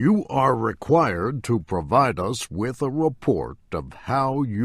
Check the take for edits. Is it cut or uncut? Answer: cut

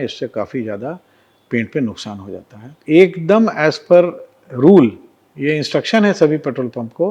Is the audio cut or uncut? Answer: cut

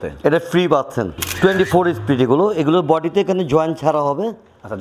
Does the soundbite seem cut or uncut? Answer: cut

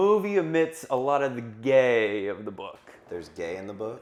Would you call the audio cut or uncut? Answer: uncut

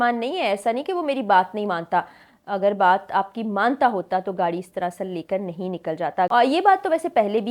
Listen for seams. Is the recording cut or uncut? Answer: cut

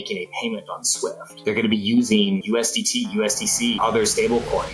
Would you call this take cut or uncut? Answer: cut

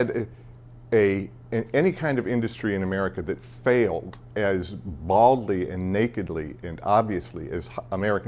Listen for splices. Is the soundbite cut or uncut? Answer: uncut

